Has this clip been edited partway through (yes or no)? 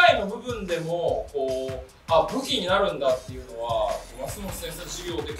no